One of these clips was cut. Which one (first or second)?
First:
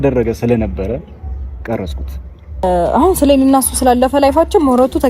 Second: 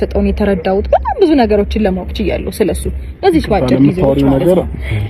first